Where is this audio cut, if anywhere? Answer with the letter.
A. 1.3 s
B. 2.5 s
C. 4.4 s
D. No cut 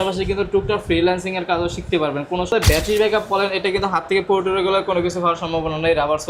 B